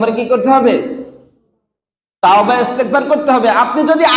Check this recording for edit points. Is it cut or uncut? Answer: uncut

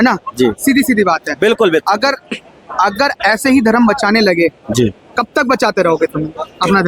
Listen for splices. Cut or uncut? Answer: uncut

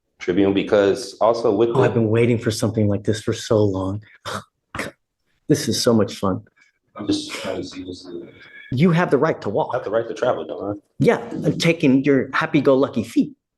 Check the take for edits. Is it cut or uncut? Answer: cut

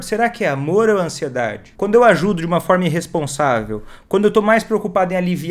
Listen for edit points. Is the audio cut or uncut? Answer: cut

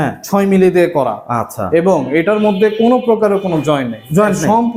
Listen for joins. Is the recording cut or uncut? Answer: uncut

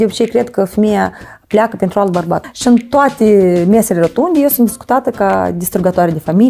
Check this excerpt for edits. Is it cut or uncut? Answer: cut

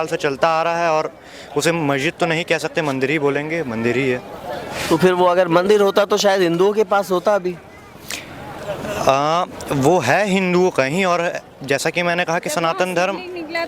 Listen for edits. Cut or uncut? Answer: uncut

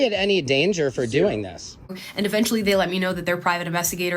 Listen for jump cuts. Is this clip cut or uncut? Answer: cut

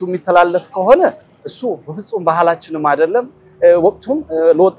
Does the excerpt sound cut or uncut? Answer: uncut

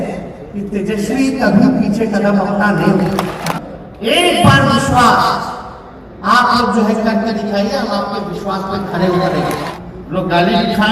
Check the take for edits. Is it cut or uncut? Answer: cut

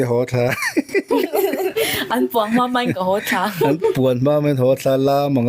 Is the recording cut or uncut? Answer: uncut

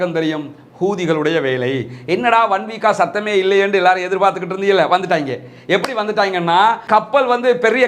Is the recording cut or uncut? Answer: cut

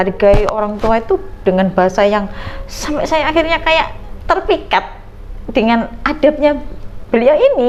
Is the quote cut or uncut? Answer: uncut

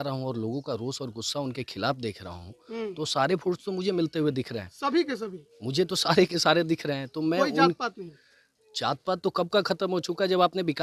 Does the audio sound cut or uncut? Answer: uncut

